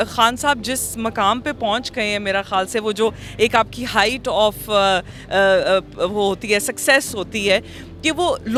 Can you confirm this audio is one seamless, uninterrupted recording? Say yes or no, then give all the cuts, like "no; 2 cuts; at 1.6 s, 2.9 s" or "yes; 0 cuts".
yes; 0 cuts